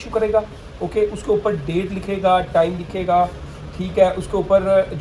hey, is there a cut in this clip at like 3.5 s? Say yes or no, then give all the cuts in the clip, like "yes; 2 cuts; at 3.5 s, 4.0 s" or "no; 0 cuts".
no; 0 cuts